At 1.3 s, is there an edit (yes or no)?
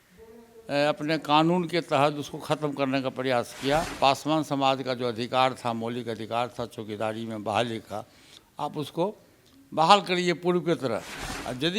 no